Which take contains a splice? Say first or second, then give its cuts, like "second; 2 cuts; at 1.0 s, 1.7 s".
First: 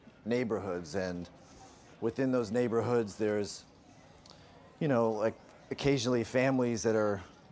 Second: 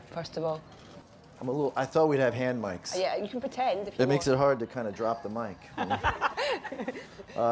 second; 1 cut; at 2.8 s